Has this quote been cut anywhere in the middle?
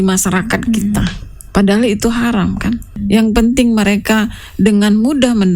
yes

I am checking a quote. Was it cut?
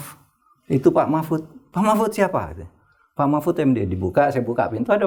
no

